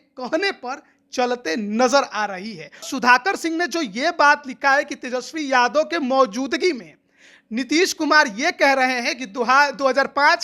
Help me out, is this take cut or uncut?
cut